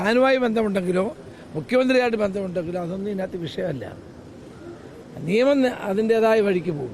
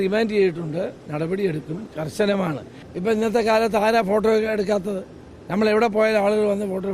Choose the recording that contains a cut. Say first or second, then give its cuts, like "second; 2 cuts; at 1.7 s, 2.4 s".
second; 1 cut; at 2.8 s